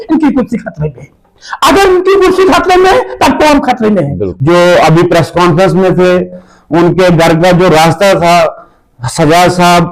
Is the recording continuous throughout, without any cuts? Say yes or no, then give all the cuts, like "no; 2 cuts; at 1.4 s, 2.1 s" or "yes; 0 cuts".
no; 1 cut; at 4.2 s